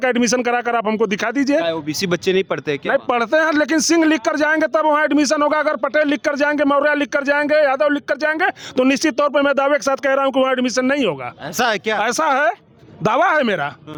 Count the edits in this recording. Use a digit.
0